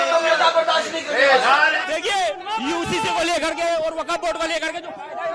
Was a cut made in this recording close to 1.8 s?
yes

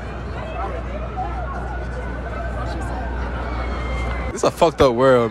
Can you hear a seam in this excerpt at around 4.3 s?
yes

